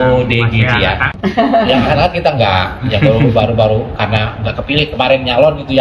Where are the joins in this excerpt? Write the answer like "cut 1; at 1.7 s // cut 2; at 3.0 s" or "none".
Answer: cut 1; at 1.1 s